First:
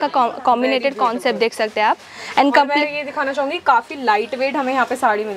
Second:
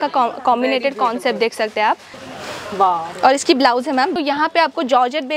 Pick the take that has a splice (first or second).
second